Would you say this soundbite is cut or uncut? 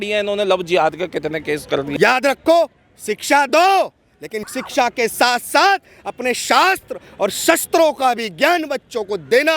cut